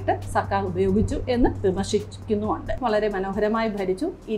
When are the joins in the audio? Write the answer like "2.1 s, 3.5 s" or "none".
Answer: 2.8 s

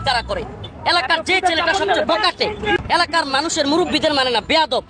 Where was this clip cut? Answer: 2.8 s

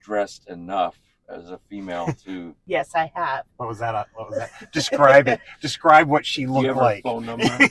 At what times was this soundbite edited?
2.5 s

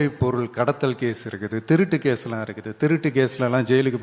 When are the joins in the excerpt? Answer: none

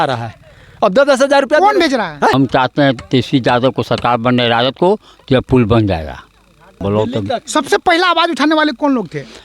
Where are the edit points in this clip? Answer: 2.3 s, 6.8 s

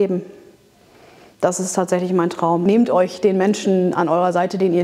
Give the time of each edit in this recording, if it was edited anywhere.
2.6 s

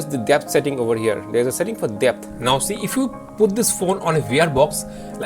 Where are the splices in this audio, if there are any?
2.3 s

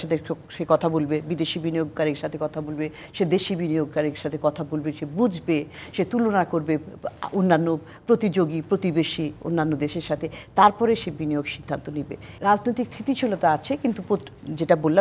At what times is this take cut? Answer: 12.2 s

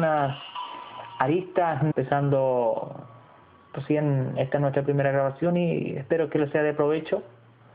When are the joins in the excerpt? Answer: none

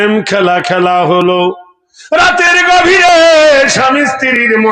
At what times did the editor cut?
none

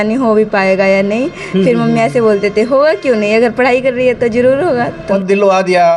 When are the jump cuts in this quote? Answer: 5.1 s

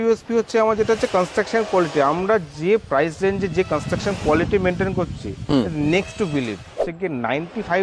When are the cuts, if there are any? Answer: 6.8 s

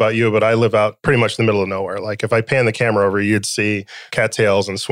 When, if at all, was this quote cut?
1.0 s, 4.0 s

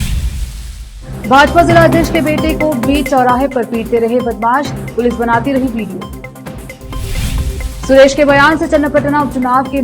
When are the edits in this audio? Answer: 0.9 s

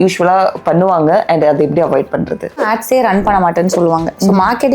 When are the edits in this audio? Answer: 2.7 s

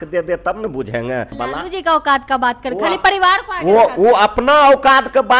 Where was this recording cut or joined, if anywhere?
1.3 s

